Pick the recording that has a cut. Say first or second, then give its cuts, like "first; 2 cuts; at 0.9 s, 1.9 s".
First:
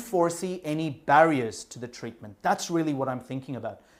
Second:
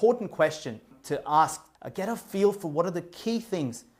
second; 2 cuts; at 1.0 s, 1.7 s